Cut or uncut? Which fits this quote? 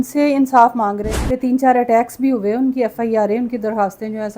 cut